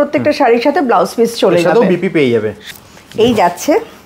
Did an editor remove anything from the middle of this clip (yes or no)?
yes